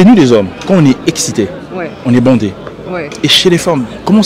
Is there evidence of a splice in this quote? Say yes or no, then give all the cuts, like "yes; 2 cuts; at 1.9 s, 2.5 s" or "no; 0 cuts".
no; 0 cuts